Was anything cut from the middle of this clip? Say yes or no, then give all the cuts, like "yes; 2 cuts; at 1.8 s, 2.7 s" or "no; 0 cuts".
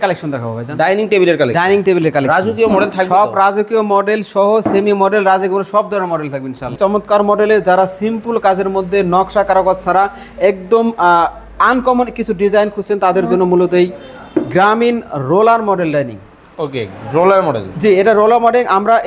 yes; 1 cut; at 6.8 s